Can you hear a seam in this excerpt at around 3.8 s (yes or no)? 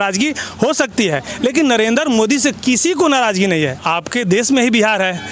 yes